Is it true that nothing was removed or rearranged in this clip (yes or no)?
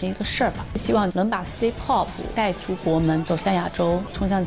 yes